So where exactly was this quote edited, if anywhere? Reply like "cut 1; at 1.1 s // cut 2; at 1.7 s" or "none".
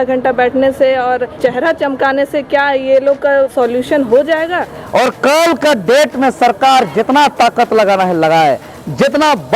cut 1; at 1.4 s // cut 2; at 3.5 s // cut 3; at 4.7 s